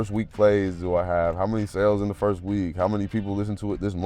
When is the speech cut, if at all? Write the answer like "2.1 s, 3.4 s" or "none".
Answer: none